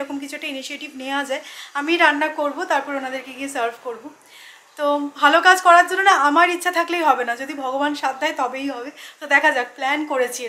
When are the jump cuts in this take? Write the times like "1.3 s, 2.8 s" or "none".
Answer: none